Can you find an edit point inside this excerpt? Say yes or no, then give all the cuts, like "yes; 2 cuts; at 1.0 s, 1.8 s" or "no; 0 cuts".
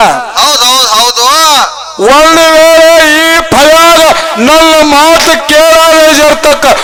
no; 0 cuts